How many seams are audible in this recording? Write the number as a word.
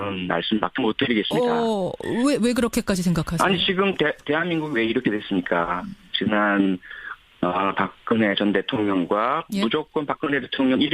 one